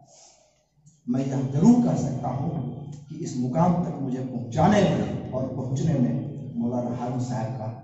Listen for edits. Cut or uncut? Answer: uncut